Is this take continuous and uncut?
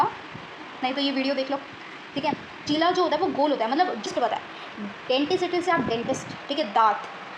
no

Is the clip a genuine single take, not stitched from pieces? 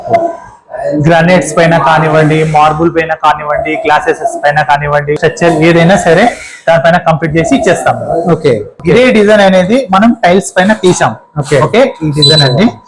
no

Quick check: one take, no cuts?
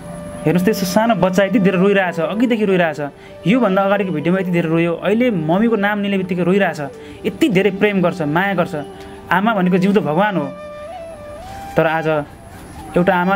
yes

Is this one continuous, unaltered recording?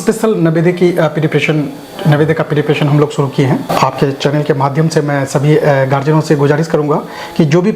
no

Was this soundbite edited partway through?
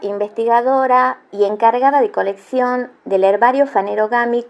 no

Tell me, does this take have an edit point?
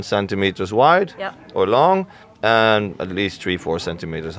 no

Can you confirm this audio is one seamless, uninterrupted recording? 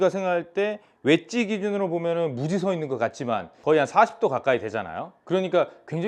no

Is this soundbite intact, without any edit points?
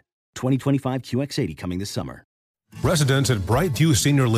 no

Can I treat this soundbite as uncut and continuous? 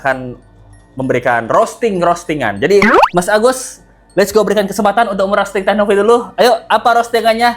yes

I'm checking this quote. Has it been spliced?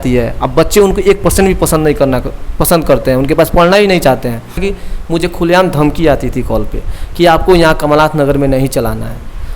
yes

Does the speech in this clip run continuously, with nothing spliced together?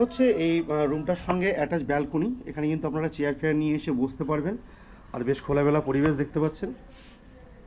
yes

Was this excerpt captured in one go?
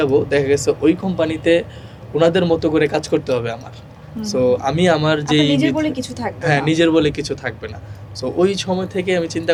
yes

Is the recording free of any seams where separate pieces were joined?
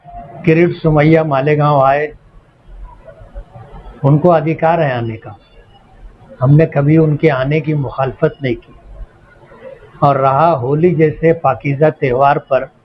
yes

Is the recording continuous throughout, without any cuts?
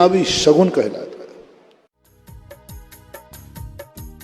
no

